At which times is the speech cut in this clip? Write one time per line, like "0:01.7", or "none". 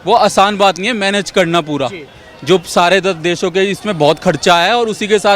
none